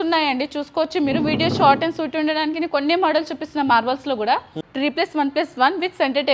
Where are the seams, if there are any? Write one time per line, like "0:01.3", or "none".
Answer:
0:04.6